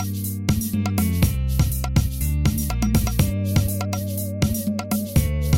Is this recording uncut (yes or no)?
no